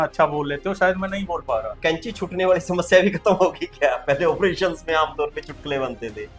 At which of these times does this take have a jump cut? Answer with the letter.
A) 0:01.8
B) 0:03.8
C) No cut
A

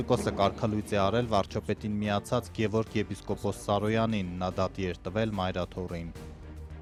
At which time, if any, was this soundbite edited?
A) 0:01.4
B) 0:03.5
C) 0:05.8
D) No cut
D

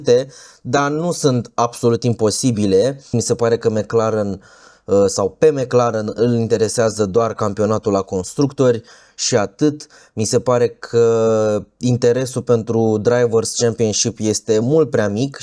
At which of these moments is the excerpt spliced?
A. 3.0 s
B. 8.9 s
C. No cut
A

